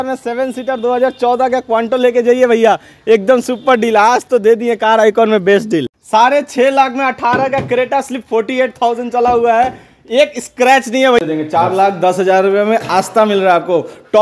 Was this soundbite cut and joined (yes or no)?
yes